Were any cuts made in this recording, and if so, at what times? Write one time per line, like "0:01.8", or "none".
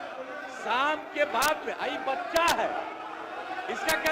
none